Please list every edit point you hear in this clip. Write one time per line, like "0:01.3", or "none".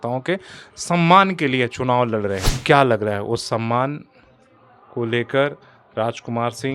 0:02.5

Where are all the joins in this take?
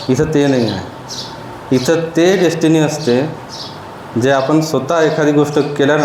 none

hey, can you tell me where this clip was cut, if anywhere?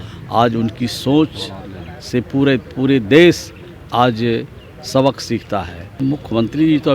0:05.8

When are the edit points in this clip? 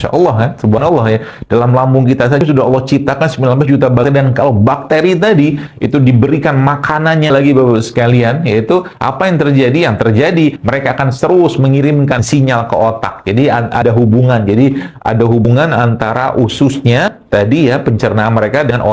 none

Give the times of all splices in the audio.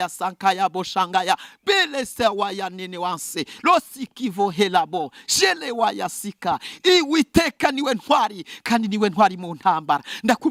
none

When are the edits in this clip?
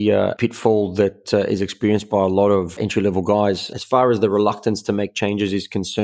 0:03.7

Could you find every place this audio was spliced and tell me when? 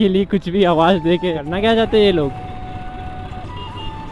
0:01.4

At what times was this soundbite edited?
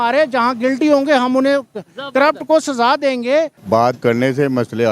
0:03.6

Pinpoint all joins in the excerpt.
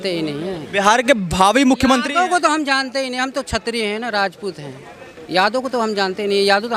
none

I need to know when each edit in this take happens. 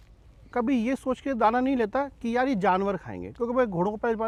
none

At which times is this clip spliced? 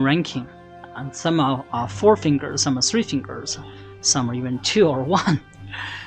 none

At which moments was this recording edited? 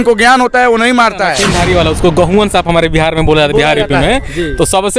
0:01.4

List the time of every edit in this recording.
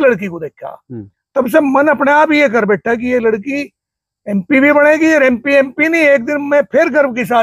none

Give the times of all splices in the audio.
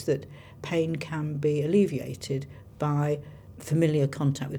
none

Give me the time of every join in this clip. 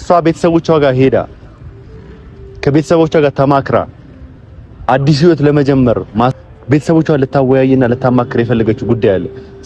0:06.3

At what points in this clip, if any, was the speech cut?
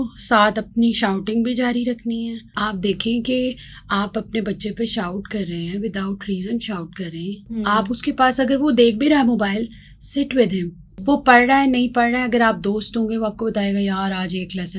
0:02.5
0:10.9

